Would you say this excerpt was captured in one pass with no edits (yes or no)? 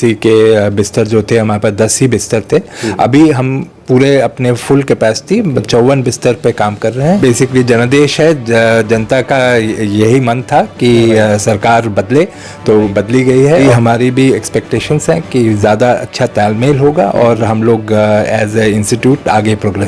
no